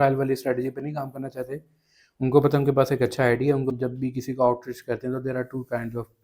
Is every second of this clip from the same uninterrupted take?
no; 1 cut; at 3.7 s

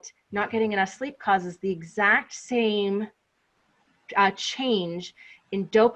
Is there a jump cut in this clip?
no; 0 cuts

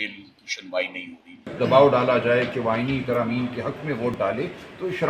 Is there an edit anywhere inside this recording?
yes; 1 cut; at 1.5 s

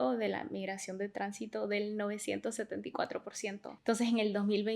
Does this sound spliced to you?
yes; 1 cut; at 3.7 s

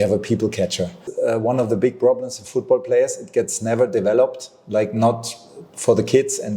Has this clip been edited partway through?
yes; 1 cut; at 1.0 s

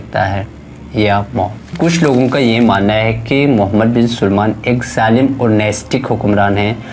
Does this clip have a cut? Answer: yes; 1 cut; at 1.7 s

